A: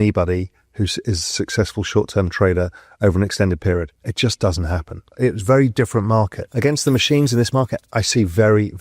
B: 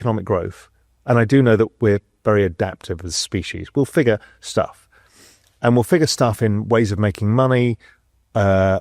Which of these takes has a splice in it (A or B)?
A